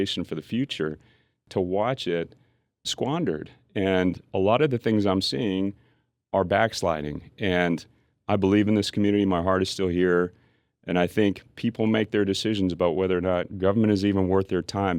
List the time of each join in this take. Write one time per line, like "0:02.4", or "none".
0:01.3
0:02.9